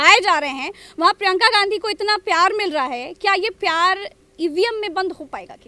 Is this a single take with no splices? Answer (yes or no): yes